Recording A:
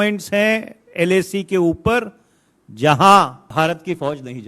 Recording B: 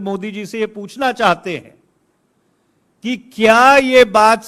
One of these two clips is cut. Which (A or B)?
A